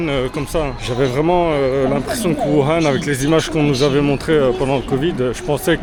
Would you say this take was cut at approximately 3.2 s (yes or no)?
no